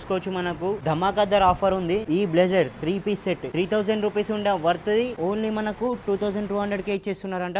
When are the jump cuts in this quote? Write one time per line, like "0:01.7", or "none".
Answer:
0:00.8
0:02.0
0:03.5
0:05.1